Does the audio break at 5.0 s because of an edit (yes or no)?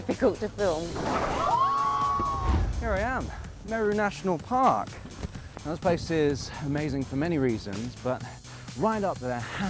no